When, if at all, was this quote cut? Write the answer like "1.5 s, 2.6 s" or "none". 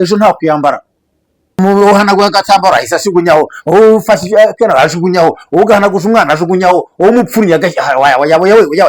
1.6 s